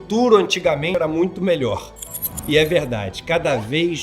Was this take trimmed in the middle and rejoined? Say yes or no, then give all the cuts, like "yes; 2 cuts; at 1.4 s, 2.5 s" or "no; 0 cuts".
yes; 1 cut; at 0.9 s